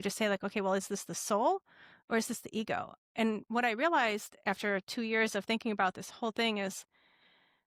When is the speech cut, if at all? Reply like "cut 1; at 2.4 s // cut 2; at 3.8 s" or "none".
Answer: none